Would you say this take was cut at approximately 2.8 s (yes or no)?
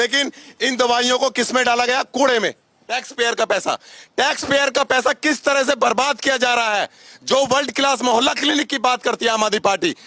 yes